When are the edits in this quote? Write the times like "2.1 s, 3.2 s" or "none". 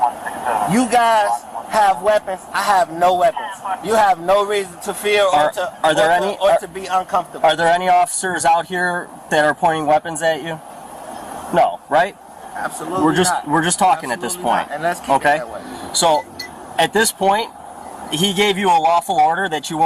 none